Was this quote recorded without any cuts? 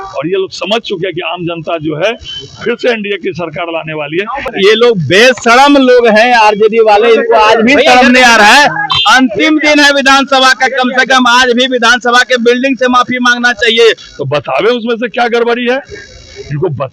no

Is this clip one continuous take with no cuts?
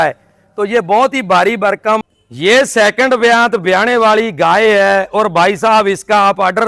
no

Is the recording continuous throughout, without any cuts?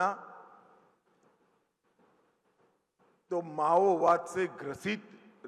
yes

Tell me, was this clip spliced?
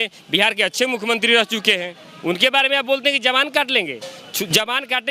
no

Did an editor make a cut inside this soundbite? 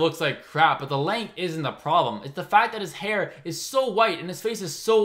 no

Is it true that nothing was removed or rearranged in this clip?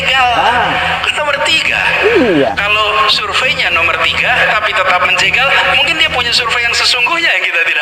yes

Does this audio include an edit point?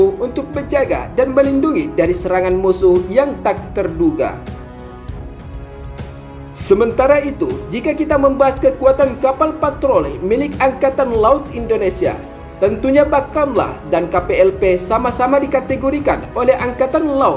yes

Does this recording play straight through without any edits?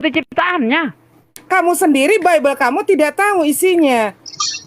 no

